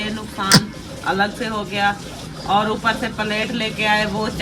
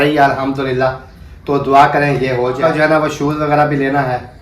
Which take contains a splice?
second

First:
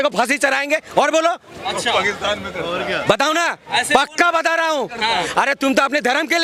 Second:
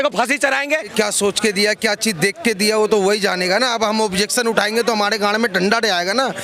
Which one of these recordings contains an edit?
second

